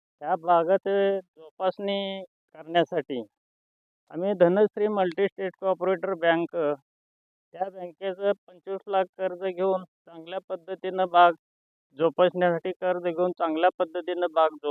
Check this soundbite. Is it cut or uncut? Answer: uncut